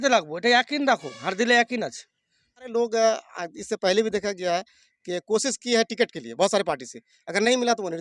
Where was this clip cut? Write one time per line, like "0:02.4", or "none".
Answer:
0:02.7